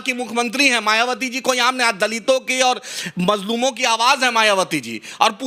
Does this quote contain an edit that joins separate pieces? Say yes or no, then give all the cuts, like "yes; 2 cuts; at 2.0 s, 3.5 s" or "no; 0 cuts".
no; 0 cuts